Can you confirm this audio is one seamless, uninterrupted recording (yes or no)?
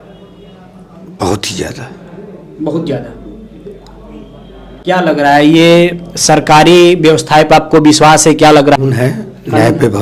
no